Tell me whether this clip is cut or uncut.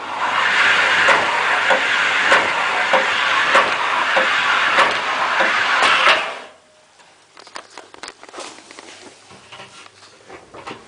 uncut